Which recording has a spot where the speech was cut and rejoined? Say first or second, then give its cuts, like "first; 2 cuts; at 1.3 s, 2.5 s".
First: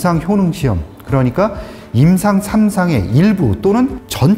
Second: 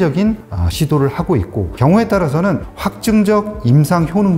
second; 1 cut; at 1.7 s